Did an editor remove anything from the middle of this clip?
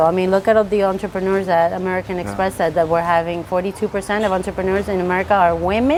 no; 0 cuts

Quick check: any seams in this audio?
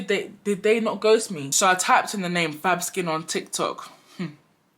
yes; 1 cut; at 1.5 s

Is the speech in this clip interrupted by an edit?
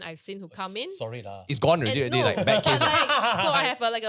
no; 0 cuts

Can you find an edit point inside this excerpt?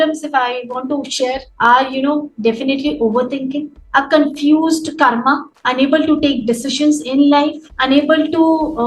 yes; 1 cut; at 1.5 s

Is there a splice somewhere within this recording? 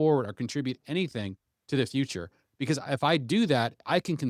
no; 0 cuts

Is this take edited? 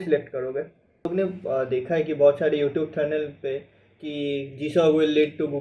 yes; 1 cut; at 1.1 s

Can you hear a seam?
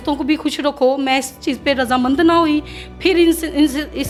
no; 0 cuts

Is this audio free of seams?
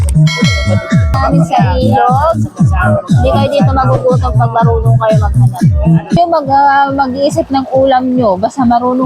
no; 2 cuts; at 1.2 s, 6.2 s

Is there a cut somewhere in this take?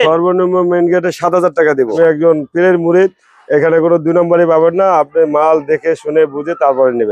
yes; 1 cut; at 1.9 s

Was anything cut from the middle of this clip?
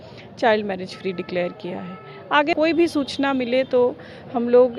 yes; 1 cut; at 2.5 s

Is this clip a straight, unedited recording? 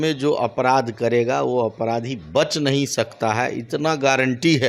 yes; 0 cuts

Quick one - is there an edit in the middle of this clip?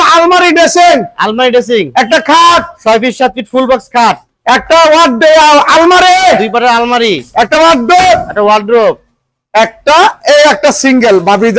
no; 0 cuts

